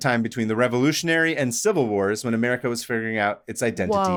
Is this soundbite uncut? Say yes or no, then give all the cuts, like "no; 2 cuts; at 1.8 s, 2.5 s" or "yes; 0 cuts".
yes; 0 cuts